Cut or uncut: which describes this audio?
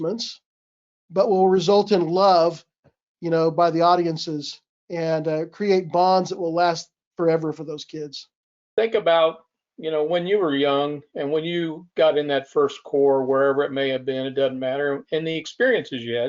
cut